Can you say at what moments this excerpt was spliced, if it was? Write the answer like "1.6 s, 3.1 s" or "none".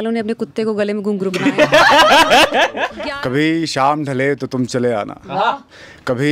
3.0 s

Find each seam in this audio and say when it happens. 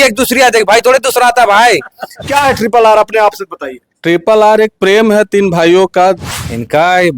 2.2 s, 6.2 s

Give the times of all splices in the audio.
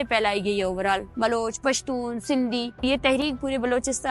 1.1 s, 2.8 s

